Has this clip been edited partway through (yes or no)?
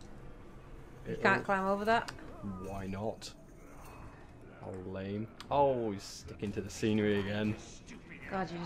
no